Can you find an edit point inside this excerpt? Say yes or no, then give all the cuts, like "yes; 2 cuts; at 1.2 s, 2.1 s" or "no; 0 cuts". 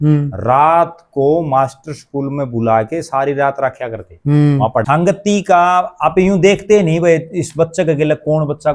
yes; 1 cut; at 4.8 s